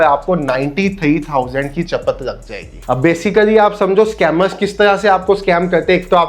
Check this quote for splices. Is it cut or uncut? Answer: uncut